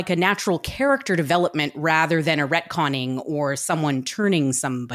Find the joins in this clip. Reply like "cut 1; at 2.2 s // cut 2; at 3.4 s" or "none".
none